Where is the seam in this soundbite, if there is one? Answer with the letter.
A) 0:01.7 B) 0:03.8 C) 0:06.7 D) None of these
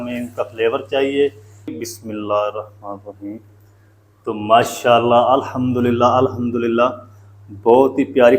A